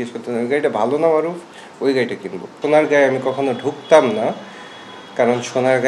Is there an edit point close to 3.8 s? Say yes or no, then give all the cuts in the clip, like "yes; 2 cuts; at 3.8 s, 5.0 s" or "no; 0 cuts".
no; 1 cut; at 2.5 s